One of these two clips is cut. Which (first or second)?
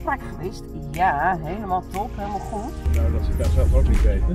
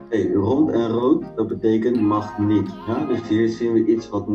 first